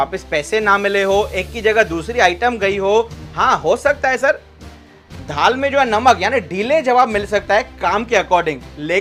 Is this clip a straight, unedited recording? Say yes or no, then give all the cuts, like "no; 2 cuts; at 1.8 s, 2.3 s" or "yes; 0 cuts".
yes; 0 cuts